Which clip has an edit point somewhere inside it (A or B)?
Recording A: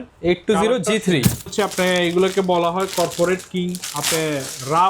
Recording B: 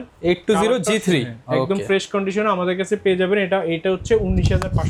A